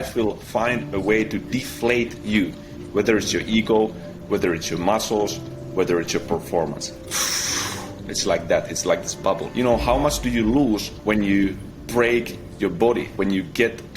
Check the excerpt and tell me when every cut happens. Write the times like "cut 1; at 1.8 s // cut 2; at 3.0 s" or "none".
cut 1; at 6.9 s // cut 2; at 9.5 s // cut 3; at 10.9 s